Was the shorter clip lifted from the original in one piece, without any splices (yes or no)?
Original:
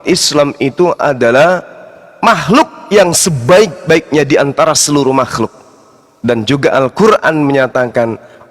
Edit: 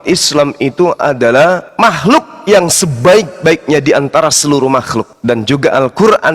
no